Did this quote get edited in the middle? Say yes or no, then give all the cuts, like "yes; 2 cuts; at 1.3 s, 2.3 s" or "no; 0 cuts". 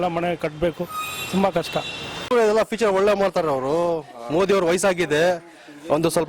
yes; 1 cut; at 2.3 s